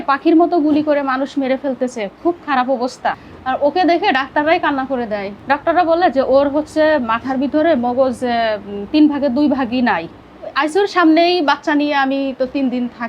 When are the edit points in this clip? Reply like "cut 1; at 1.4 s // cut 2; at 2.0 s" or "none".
cut 1; at 3.3 s // cut 2; at 5.3 s // cut 3; at 10.2 s